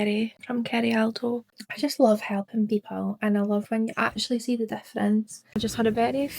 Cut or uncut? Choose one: cut